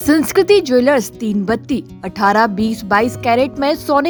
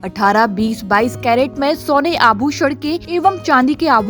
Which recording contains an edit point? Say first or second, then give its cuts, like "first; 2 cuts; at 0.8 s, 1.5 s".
second; 1 cut; at 3.0 s